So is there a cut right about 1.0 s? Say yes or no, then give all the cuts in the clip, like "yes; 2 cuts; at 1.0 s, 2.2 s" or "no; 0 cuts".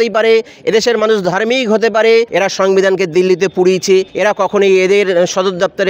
no; 2 cuts; at 2.3 s, 4.1 s